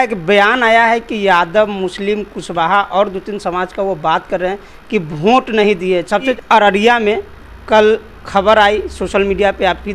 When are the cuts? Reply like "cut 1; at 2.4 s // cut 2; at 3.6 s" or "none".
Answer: cut 1; at 6.4 s